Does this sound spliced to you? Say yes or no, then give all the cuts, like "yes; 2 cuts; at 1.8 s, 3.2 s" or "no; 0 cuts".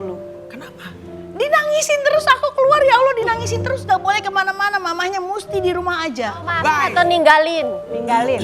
yes; 1 cut; at 6.5 s